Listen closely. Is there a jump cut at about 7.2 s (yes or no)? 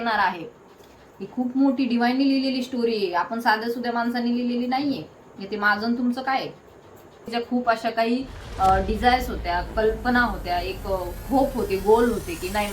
yes